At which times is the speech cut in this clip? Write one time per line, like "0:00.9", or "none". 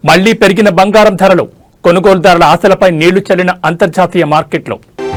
none